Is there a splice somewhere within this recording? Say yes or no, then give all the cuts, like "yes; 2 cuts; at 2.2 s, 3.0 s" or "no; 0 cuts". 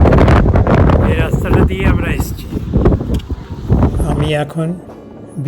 yes; 1 cut; at 4.0 s